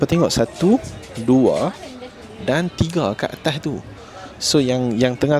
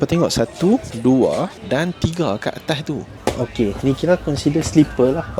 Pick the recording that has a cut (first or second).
second